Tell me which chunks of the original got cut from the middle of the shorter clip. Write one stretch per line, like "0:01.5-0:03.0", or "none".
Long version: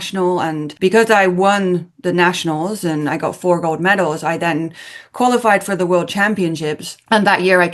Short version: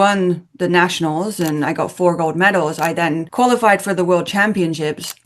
0:04.7-0:05.1